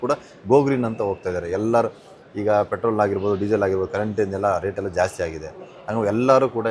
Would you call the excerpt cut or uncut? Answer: uncut